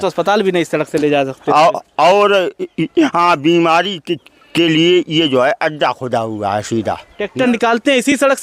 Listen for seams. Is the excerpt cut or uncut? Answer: cut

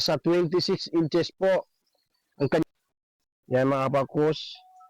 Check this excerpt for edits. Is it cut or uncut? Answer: cut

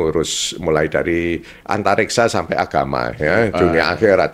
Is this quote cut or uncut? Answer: uncut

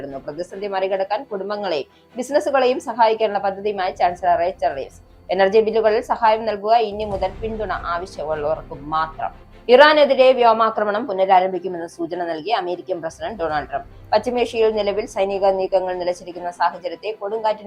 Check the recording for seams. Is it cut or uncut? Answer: uncut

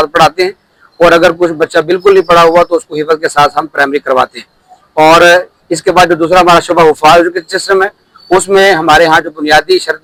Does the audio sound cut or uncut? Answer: uncut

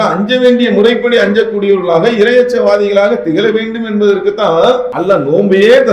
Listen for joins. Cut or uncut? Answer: cut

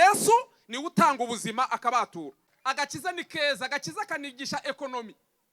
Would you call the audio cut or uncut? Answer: cut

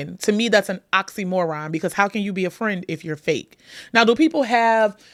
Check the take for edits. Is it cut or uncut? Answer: uncut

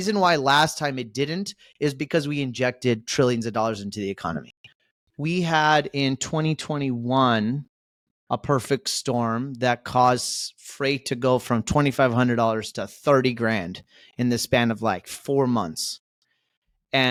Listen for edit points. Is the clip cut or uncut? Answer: uncut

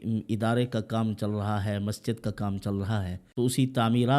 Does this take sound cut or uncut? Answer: cut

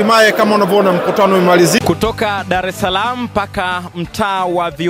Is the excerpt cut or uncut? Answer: cut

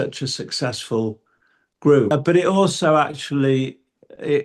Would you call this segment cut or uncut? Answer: cut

